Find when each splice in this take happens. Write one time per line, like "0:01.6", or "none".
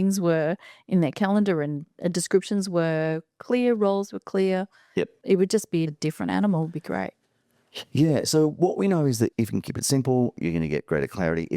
0:05.9
0:09.3